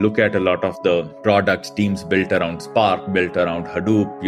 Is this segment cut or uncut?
uncut